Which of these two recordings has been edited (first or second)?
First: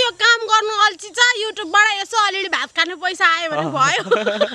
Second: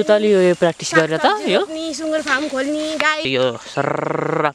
second